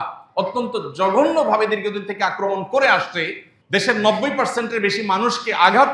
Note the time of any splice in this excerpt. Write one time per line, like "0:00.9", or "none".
0:03.5

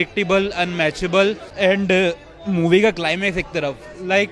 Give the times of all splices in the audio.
0:01.5

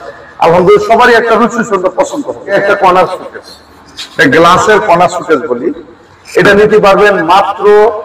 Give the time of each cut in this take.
0:02.5

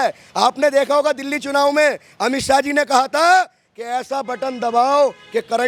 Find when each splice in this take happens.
none

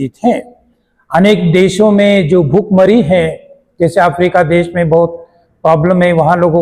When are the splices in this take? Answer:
none

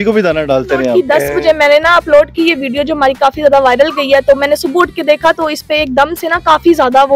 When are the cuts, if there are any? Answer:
0:00.9

